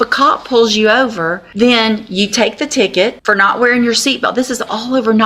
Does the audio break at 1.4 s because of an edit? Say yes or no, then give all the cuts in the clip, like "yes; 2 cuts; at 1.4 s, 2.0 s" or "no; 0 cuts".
yes; 2 cuts; at 1.4 s, 3.2 s